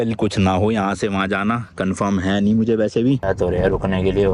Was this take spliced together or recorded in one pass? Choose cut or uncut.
cut